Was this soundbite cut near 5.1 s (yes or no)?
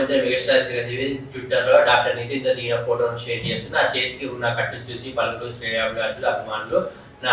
no